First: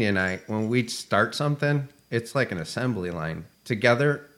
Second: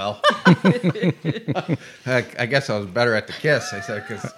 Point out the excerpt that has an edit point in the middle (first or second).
first